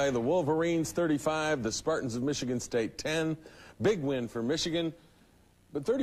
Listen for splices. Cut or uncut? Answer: uncut